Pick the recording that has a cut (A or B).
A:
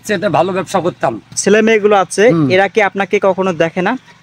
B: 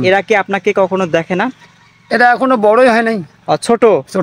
A